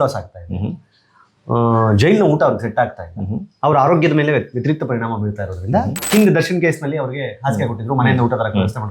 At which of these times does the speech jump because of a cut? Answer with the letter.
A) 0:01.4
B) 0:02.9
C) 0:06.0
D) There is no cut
C